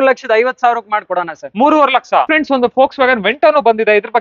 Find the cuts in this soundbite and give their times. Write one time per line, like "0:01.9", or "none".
none